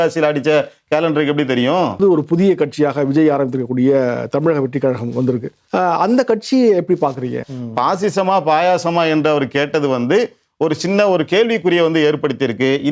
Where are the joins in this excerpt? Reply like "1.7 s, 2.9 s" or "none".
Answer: 2.0 s, 5.5 s, 7.4 s